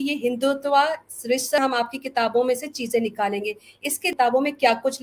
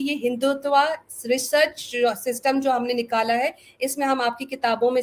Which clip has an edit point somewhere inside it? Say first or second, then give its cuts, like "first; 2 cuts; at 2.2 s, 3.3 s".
first; 2 cuts; at 1.6 s, 4.1 s